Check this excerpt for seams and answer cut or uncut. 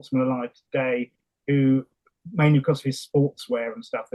uncut